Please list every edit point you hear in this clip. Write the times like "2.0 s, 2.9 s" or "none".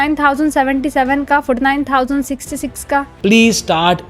3.1 s

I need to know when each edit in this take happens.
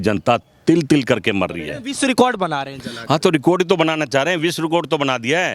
1.8 s

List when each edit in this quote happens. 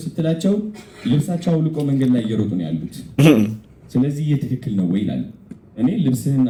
none

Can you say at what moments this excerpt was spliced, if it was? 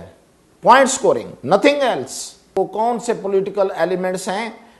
2.6 s

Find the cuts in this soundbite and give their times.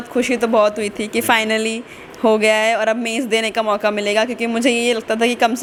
none

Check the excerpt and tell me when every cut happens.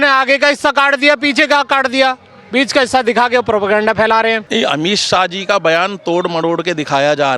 4.4 s

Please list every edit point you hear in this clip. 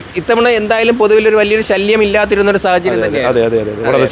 none

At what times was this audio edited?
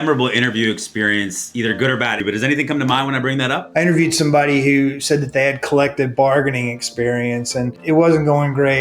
2.2 s, 3.6 s, 7.8 s

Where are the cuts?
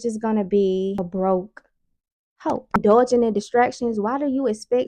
1.0 s, 2.8 s

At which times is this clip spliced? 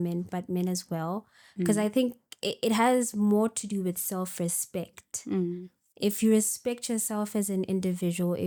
none

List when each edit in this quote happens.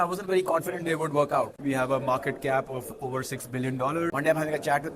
1.5 s, 4.1 s

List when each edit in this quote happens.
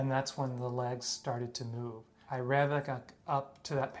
2.2 s

